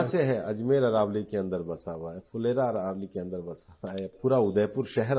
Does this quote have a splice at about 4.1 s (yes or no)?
yes